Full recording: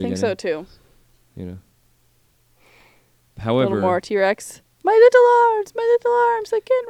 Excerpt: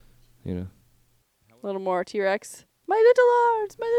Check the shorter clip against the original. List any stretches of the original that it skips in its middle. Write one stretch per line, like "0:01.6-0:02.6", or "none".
0:02.6-0:03.6